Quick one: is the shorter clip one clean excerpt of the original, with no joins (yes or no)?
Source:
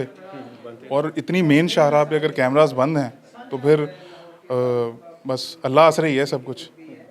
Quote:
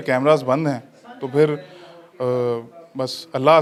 yes